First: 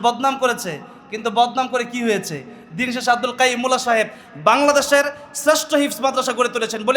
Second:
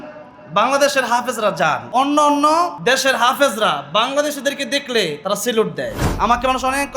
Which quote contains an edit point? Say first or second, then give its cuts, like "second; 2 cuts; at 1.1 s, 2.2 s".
second; 4 cuts; at 1.8 s, 2.8 s, 5.2 s, 6.0 s